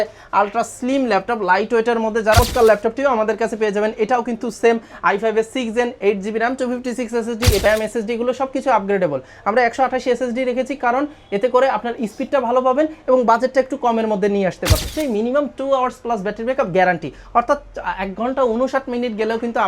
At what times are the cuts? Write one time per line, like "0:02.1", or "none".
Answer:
0:02.4
0:07.6
0:14.9